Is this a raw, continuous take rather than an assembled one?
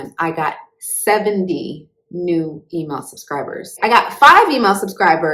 no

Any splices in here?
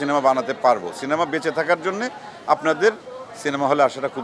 no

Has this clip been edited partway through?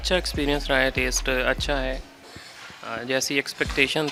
no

